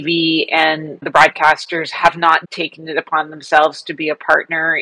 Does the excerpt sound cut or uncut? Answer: cut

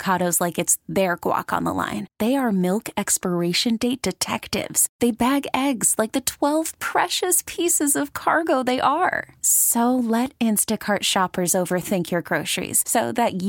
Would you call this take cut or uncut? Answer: uncut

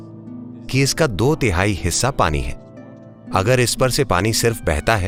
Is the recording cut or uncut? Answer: uncut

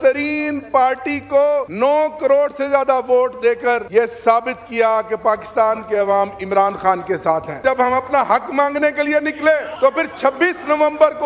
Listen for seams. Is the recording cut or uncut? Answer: cut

